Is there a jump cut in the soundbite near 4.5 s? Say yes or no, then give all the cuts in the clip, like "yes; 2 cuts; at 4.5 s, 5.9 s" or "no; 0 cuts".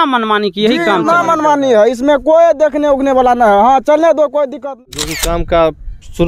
yes; 1 cut; at 4.5 s